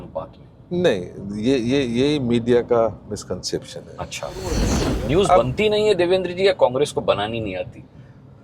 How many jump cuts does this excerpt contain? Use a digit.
1